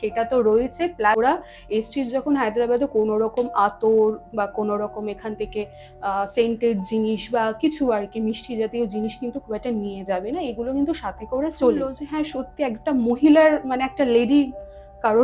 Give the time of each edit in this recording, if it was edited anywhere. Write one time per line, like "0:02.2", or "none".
0:01.2
0:12.0

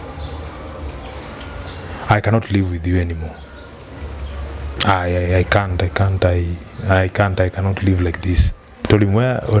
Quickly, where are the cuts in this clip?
0:08.6

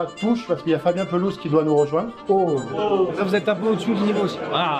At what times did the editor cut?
0:03.1

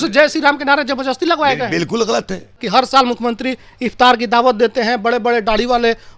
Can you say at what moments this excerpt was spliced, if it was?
0:02.6

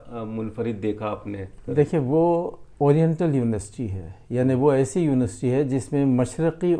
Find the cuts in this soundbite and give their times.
0:01.5

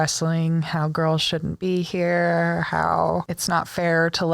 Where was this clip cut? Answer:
0:03.3

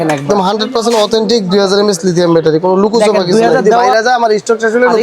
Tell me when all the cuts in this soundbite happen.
0:03.8

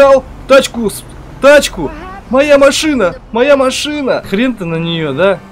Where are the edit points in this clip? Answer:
0:04.3

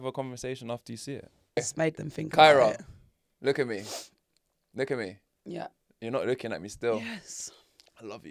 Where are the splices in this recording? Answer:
0:01.6

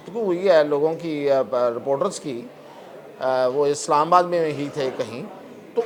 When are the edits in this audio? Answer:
none

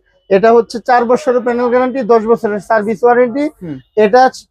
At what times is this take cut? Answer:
none

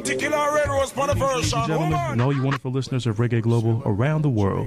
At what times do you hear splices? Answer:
0:02.1

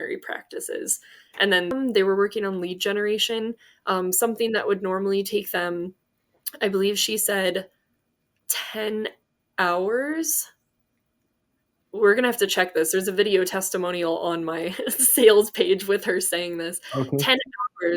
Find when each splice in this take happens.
0:01.7

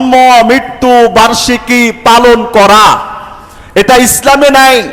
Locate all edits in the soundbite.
none

